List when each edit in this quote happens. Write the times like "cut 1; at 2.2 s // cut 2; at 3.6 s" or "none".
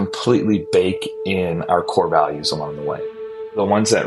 cut 1; at 3.0 s